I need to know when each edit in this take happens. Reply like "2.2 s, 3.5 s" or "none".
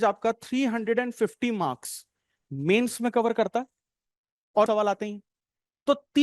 4.7 s